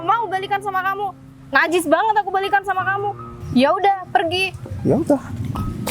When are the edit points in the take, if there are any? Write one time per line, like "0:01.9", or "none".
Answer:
0:03.3